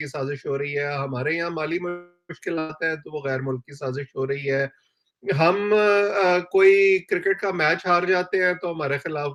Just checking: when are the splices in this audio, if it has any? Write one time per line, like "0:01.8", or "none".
none